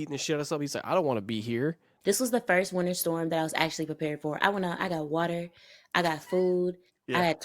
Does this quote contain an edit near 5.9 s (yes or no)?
no